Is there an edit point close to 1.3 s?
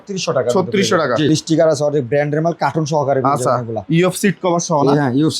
yes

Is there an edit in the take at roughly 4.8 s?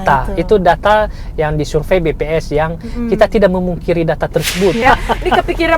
yes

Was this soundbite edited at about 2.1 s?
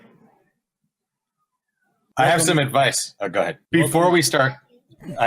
no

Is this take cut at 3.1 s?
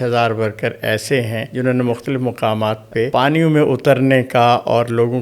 yes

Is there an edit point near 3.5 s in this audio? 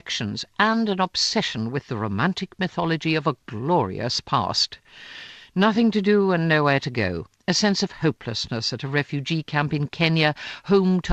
no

